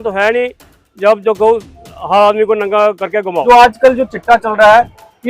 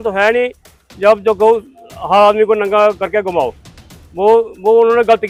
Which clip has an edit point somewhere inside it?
first; 1 cut; at 3.4 s

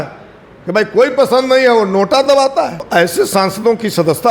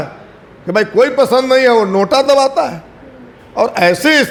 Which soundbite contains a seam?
first; 1 cut; at 2.9 s

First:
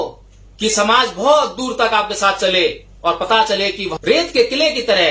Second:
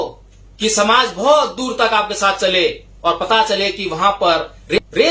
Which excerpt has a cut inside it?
first; 1 cut; at 4.0 s

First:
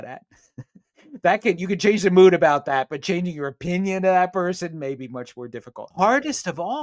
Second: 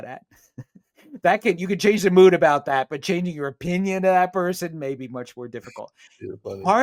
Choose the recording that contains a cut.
first; 1 cut; at 5.9 s

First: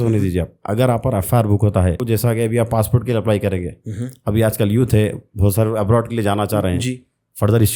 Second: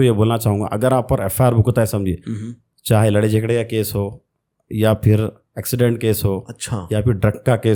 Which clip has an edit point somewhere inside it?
first; 1 cut; at 2.0 s

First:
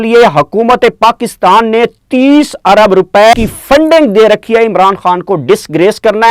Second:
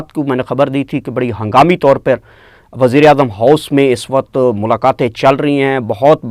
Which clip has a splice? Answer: first; 1 cut; at 3.3 s

